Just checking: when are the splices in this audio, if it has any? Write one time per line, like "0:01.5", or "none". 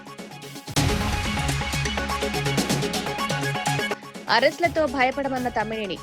0:00.7
0:03.8